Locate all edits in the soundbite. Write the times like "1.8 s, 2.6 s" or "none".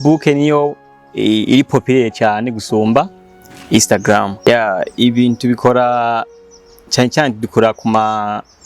4.4 s